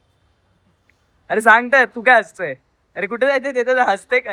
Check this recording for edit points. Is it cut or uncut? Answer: uncut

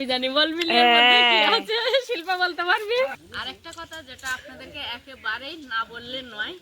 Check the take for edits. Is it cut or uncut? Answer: cut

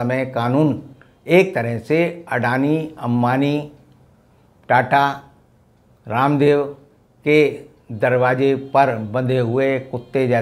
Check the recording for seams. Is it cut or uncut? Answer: uncut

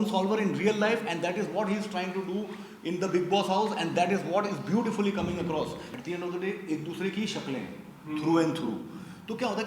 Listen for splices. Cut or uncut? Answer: cut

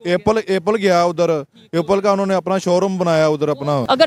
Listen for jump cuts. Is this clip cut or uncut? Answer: uncut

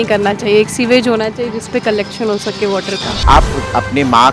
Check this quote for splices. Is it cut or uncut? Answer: cut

